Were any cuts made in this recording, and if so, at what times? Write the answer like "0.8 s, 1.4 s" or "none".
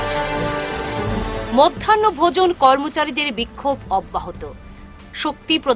none